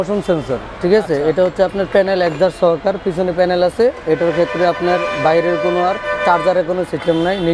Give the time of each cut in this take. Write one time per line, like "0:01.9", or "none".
none